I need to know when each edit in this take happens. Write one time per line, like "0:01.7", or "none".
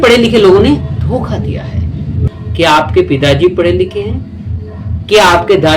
0:02.2